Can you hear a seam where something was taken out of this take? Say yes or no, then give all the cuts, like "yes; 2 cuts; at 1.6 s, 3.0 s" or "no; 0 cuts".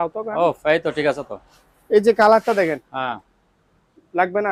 no; 0 cuts